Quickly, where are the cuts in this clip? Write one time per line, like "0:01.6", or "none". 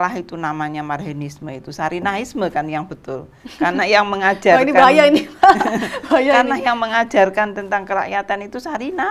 none